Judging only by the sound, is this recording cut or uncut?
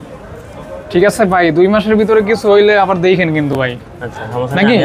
uncut